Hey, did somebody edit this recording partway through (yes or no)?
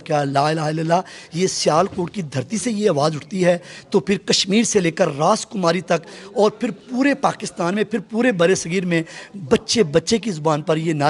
no